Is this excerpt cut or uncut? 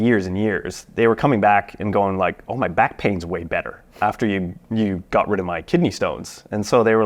uncut